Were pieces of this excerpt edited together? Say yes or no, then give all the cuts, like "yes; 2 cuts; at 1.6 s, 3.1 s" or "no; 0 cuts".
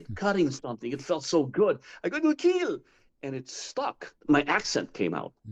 yes; 1 cut; at 4.0 s